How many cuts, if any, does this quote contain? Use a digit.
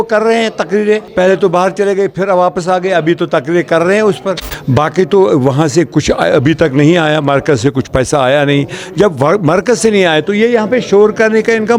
2